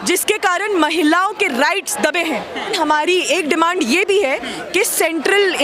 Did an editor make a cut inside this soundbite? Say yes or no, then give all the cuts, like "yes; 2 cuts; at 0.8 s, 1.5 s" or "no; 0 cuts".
yes; 1 cut; at 2.7 s